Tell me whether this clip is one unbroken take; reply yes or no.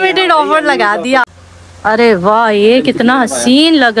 no